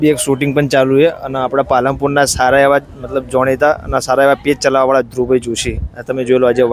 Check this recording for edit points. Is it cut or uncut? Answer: uncut